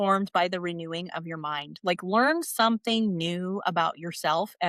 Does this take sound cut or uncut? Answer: uncut